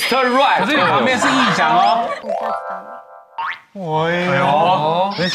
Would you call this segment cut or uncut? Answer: cut